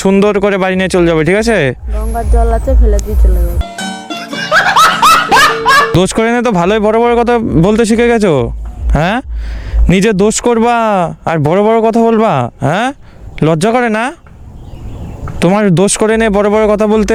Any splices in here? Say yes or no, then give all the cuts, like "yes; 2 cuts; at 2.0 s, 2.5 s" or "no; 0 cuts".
no; 0 cuts